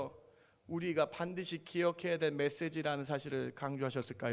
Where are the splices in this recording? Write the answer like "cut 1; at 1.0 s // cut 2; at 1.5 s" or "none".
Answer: none